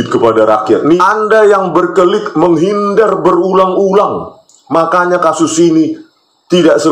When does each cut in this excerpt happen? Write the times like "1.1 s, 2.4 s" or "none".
1.0 s